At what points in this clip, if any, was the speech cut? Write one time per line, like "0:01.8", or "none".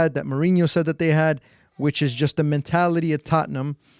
none